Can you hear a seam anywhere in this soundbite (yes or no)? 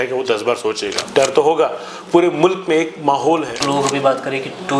yes